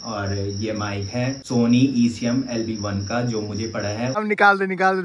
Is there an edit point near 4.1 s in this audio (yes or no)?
yes